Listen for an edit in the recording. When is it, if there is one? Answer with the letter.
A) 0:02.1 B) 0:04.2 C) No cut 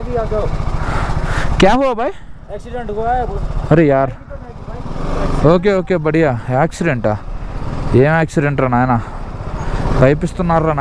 C